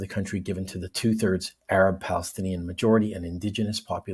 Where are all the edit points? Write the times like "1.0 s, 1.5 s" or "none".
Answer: none

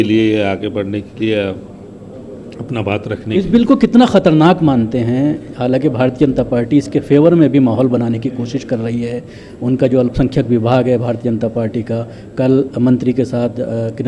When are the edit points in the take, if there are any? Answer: none

